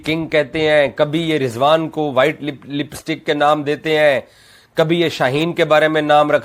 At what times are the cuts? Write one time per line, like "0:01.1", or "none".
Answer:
0:01.5